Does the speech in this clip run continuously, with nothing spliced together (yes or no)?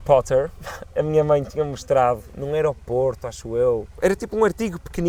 no